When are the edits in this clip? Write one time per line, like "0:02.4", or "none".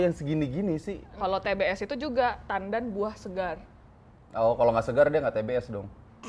0:01.2